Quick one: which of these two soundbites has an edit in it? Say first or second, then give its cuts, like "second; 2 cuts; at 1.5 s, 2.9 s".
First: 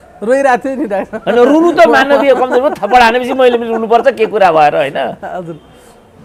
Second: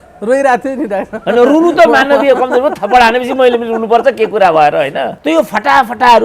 second; 1 cut; at 5.1 s